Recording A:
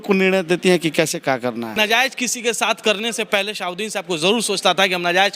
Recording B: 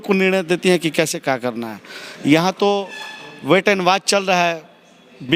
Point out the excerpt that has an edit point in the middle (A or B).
A